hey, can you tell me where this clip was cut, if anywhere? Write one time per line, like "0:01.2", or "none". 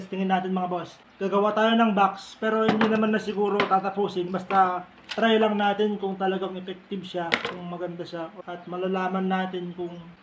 0:08.4